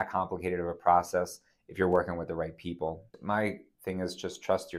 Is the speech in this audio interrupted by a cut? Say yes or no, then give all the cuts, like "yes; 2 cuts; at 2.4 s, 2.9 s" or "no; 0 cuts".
yes; 1 cut; at 3.1 s